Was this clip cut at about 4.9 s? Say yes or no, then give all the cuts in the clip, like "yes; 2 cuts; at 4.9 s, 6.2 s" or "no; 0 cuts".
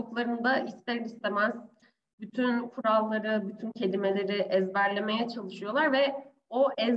no; 0 cuts